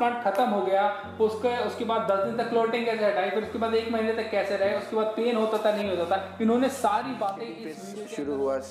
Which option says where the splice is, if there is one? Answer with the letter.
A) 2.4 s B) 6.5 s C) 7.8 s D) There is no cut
C